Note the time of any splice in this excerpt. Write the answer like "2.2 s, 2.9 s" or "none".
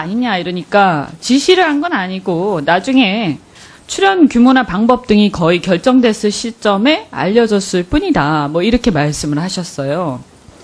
1.3 s